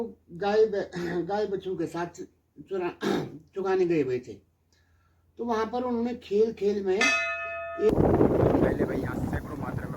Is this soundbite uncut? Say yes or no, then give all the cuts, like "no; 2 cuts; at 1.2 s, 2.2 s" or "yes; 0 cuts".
no; 1 cut; at 7.9 s